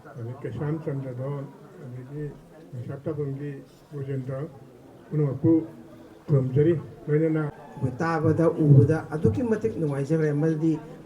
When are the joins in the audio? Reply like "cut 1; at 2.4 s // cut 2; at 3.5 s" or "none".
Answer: cut 1; at 7.6 s